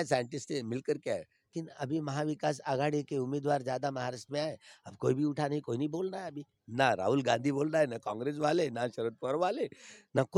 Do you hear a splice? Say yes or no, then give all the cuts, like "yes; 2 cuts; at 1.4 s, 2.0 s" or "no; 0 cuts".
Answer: yes; 1 cut; at 1.4 s